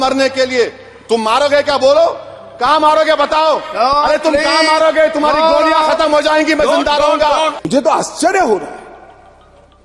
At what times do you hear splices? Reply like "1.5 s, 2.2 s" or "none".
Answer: 7.6 s